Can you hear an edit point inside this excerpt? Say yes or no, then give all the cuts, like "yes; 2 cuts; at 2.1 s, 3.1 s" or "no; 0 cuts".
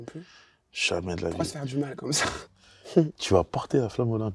yes; 1 cut; at 2.4 s